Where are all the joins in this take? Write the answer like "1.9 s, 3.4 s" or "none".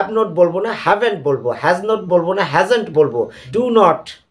3.4 s